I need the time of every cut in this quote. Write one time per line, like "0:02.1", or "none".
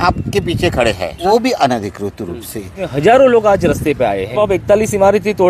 0:01.2
0:02.8
0:04.4

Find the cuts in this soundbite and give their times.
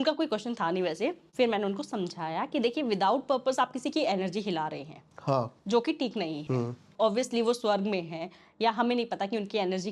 0:01.2

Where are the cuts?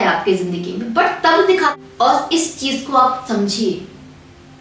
0:01.7

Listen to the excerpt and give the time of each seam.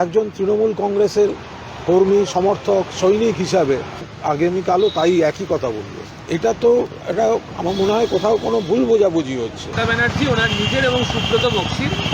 0:09.6

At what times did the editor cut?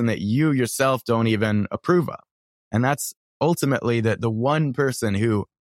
none

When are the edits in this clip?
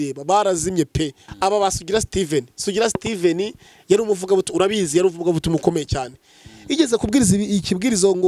0:01.2

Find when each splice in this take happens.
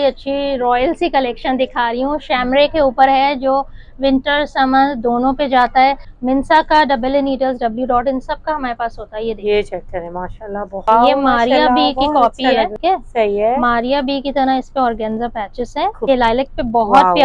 0:06.1
0:10.9
0:12.7
0:16.1

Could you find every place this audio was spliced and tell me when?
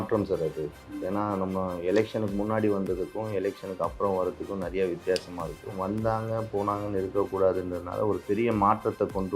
0:05.8

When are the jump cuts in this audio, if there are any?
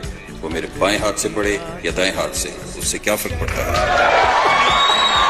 none

